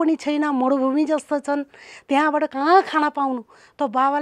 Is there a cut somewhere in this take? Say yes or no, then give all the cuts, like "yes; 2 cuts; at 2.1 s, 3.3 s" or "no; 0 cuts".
no; 0 cuts